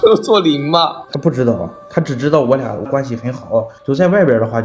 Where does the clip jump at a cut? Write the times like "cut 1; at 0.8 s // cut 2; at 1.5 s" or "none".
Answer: cut 1; at 3.7 s